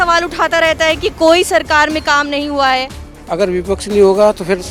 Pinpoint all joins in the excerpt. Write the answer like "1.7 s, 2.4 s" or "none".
none